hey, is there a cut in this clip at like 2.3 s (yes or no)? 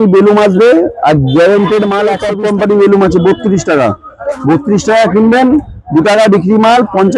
yes